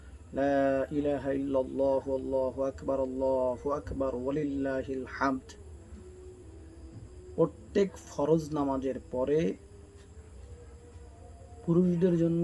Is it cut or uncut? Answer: uncut